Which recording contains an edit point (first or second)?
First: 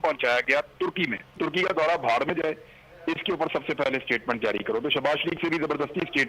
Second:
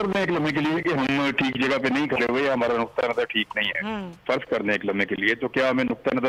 first